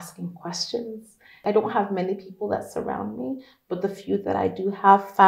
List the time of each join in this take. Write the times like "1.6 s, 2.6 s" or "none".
1.4 s